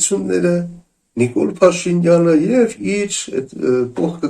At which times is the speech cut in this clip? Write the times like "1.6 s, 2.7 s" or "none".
none